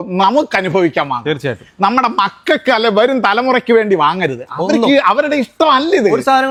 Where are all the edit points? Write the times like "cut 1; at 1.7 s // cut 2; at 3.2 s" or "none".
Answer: none